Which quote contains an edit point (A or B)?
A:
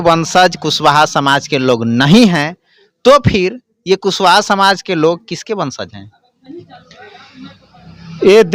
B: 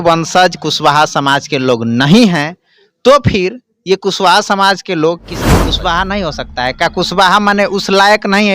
B